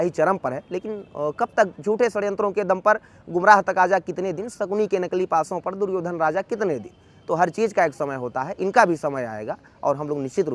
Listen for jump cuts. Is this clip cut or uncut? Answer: uncut